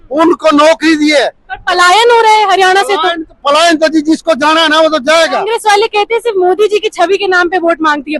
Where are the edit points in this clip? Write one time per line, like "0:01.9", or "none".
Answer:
0:05.5